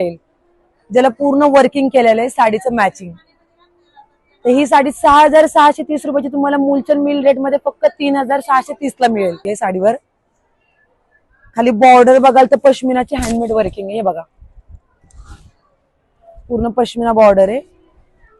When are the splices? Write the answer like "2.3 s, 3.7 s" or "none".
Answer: 9.5 s

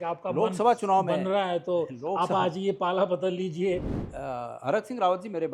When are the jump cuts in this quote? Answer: 4.0 s

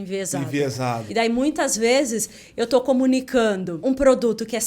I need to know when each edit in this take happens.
1.0 s, 3.7 s

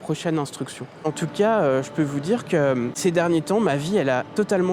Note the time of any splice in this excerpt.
1.1 s, 3.0 s

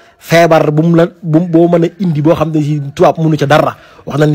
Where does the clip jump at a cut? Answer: none

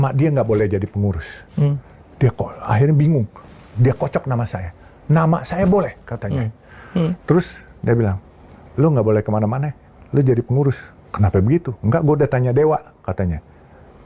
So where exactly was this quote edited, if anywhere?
none

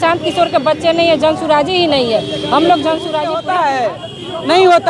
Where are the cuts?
3.4 s

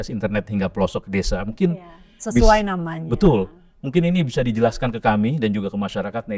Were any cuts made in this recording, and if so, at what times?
none

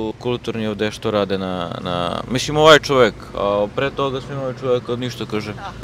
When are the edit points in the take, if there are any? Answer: none

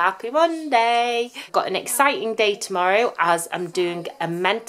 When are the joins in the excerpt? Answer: 1.4 s

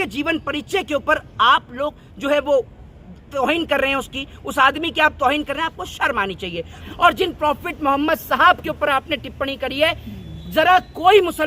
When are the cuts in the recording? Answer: 6.8 s

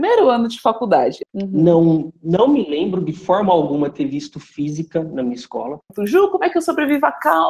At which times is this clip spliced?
1.1 s, 5.9 s

